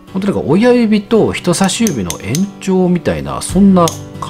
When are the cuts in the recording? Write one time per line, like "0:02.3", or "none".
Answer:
none